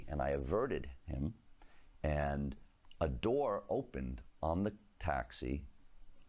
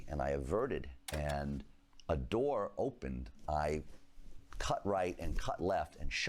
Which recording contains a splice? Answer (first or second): second